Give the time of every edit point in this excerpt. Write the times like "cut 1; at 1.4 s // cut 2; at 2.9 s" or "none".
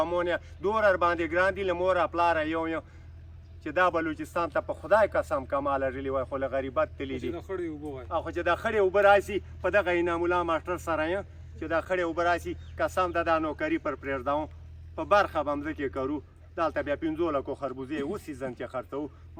none

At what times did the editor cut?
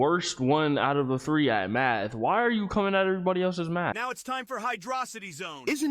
cut 1; at 3.9 s

